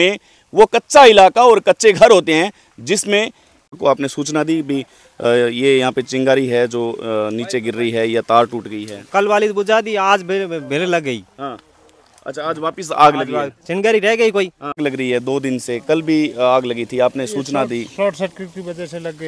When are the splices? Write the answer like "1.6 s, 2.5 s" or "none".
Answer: 3.7 s, 14.8 s